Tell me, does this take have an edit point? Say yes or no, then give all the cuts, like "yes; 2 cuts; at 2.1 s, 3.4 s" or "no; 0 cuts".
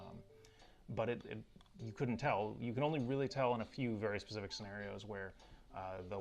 yes; 1 cut; at 3.7 s